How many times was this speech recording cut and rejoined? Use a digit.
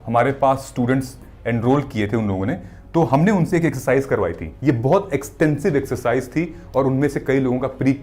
0